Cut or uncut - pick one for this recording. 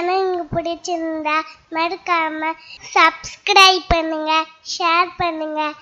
uncut